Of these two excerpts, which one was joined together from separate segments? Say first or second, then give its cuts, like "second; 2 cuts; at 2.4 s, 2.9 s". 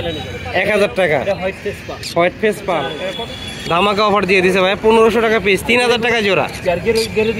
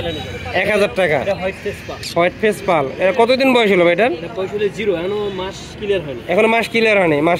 first; 1 cut; at 2.9 s